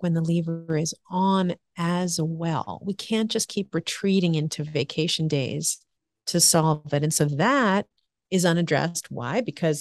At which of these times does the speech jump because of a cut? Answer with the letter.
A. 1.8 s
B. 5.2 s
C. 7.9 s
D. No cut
D